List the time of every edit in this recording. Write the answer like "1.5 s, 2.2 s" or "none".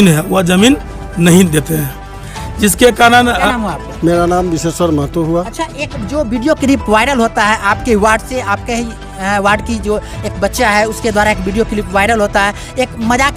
3.4 s

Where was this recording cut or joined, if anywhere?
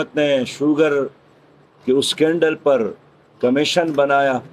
none

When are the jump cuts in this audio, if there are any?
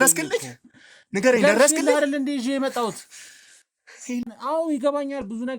4.3 s

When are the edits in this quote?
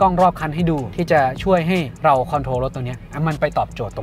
0.9 s, 1.9 s

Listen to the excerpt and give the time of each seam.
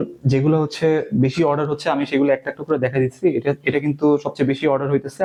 none

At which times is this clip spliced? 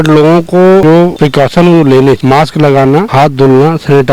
1.0 s, 2.2 s, 3.1 s

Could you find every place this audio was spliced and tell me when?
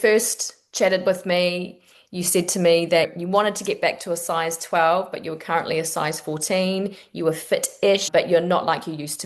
3.1 s, 8.0 s

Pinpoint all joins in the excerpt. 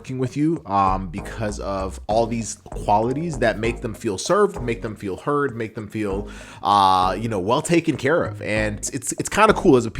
9.0 s

